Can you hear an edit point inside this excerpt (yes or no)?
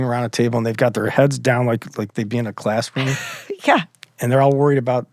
no